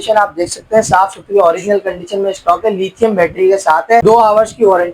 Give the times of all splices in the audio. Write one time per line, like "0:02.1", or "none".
0:04.0